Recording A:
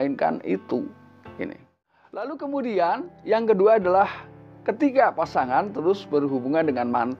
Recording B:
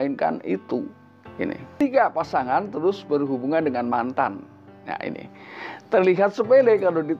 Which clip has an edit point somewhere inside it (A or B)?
B